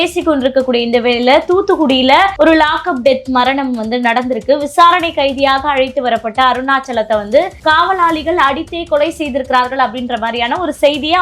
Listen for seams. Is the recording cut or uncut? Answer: cut